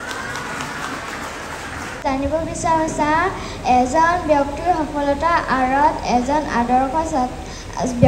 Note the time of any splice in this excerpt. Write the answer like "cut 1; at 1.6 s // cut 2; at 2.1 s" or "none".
cut 1; at 2.0 s

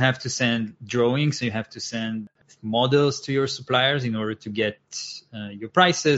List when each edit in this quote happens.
cut 1; at 2.2 s

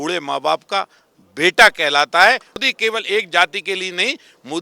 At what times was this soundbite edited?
cut 1; at 2.7 s

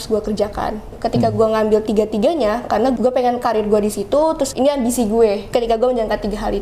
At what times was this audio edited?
cut 1; at 0.9 s // cut 2; at 3.0 s // cut 3; at 4.5 s // cut 4; at 5.5 s

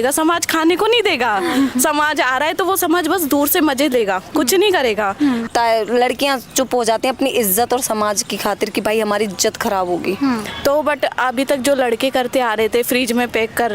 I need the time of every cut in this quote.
cut 1; at 5.5 s // cut 2; at 10.5 s

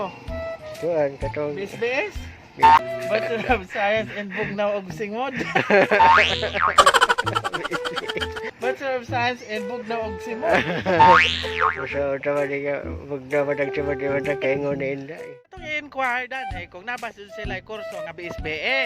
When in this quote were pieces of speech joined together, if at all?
cut 1; at 2.8 s // cut 2; at 8.4 s // cut 3; at 15.6 s

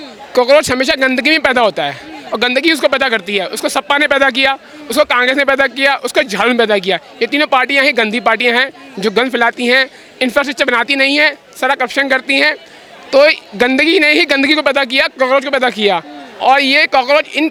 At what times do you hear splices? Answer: none

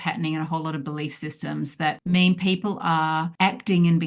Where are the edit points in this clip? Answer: cut 1; at 2.0 s // cut 2; at 3.3 s

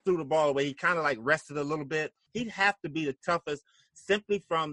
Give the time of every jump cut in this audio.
cut 1; at 2.2 s

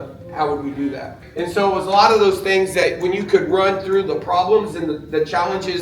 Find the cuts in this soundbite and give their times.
none

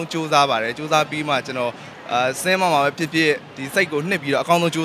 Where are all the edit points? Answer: none

